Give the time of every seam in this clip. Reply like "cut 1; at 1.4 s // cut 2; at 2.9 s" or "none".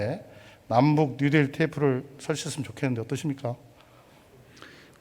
none